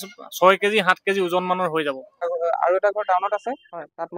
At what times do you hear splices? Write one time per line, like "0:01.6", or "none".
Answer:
0:02.2